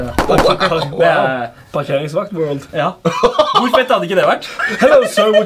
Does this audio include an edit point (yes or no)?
yes